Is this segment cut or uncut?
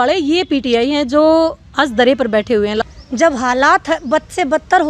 cut